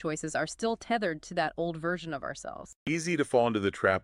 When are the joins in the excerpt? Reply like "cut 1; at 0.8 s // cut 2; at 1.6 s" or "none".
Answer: cut 1; at 2.8 s